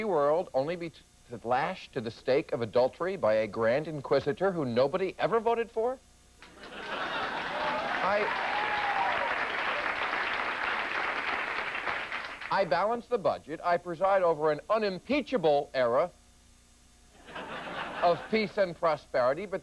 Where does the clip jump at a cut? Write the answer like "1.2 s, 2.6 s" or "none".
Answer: none